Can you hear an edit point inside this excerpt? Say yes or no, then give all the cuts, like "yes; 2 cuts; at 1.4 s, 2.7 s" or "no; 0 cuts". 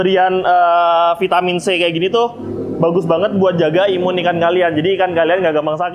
no; 0 cuts